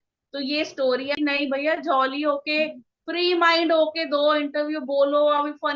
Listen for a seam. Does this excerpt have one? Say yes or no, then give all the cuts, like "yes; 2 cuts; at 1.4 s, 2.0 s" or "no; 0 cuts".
yes; 1 cut; at 1.2 s